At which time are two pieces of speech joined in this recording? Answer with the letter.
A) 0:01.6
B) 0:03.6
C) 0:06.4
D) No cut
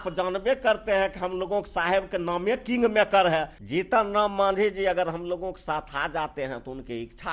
B